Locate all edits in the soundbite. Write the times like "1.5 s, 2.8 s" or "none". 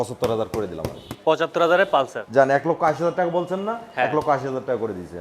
2.1 s